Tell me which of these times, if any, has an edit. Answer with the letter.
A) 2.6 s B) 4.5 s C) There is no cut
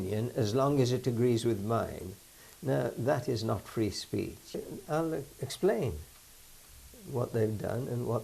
B